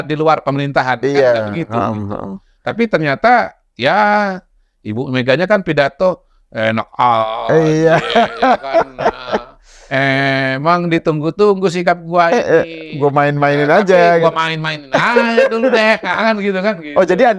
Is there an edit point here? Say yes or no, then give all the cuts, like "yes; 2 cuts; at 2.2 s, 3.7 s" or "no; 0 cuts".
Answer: no; 0 cuts